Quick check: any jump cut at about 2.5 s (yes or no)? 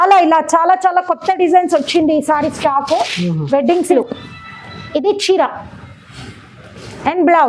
no